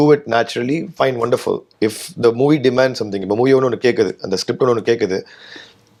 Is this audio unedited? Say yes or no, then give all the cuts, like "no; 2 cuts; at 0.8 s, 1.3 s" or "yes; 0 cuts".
yes; 0 cuts